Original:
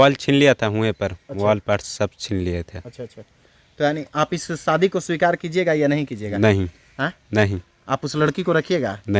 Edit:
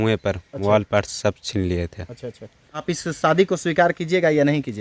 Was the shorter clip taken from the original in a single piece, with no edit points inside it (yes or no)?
no